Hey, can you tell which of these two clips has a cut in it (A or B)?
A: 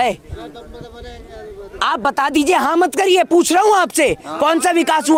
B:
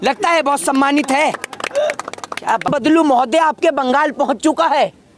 B